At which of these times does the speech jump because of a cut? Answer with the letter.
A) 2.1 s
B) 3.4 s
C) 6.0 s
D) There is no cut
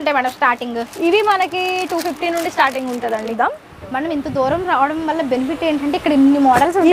B